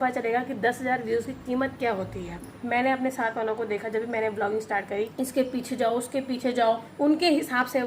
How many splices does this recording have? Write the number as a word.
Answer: three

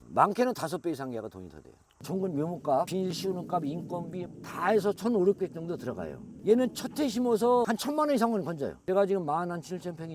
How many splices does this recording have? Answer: three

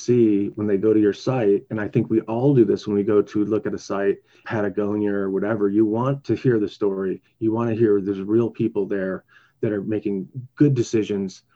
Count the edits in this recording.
two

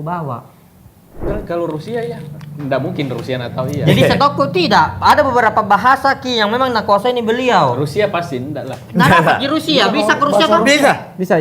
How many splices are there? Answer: one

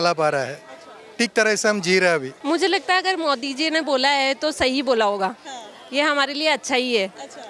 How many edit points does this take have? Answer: one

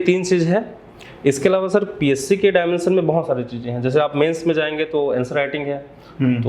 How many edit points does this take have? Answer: zero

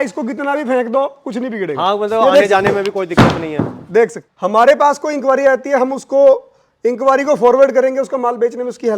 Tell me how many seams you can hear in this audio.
one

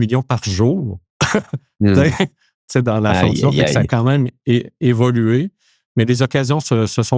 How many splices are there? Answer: zero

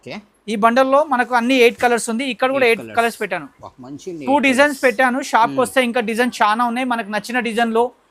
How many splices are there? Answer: zero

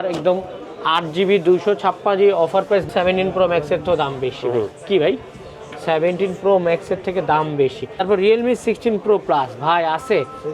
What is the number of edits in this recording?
two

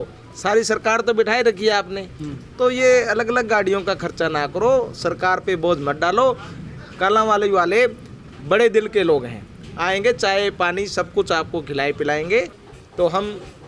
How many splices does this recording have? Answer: one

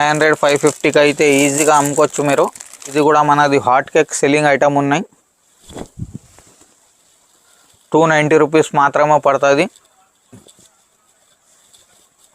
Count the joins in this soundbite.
one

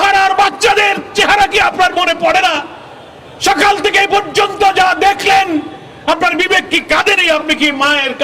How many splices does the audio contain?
zero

